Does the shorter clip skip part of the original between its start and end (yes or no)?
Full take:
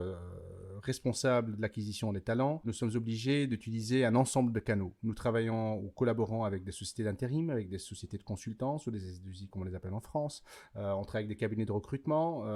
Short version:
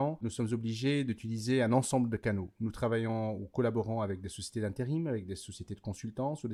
no